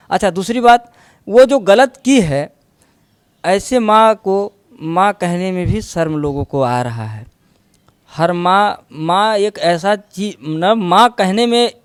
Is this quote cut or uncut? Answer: uncut